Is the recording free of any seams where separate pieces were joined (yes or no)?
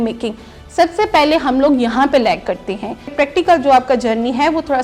no